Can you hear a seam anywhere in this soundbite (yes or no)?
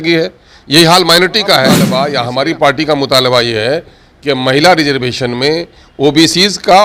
yes